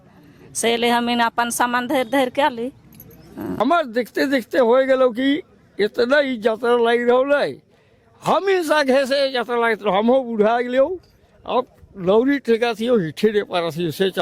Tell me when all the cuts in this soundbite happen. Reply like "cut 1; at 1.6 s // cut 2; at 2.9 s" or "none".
cut 1; at 3.6 s